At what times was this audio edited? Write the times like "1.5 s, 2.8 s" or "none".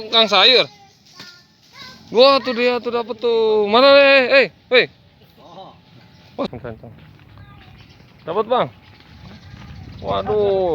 6.5 s